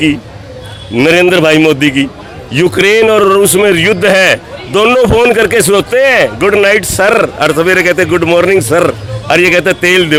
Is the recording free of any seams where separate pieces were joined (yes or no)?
yes